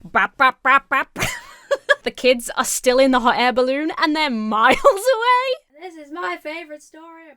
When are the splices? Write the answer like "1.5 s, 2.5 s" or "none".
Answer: 2.1 s, 5.7 s